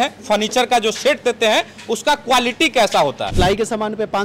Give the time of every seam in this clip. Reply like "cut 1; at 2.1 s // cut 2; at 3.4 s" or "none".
cut 1; at 3.3 s